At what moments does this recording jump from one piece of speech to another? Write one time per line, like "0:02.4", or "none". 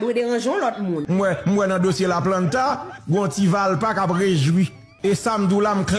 0:01.0
0:04.8